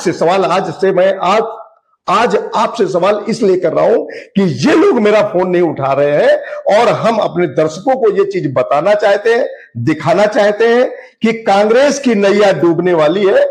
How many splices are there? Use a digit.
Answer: 0